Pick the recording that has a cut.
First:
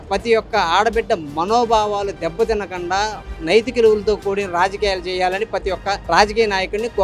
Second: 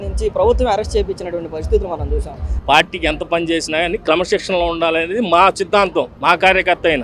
second; 1 cut; at 2.6 s

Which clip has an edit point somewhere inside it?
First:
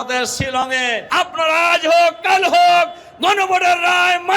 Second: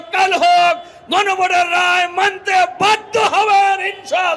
first; 1 cut; at 1.0 s

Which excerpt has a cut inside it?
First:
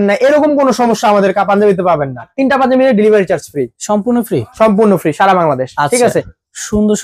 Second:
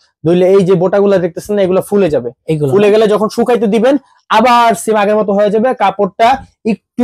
first; 2 cuts; at 2.3 s, 6.1 s

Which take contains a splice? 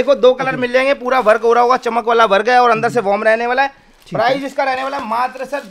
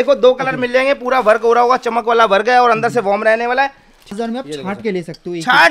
second; 1 cut; at 4.1 s

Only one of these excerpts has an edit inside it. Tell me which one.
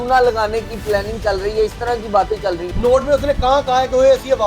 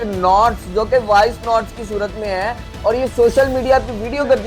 first; 1 cut; at 2.7 s

